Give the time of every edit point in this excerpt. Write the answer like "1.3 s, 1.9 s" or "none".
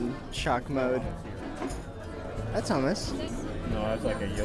2.2 s, 3.3 s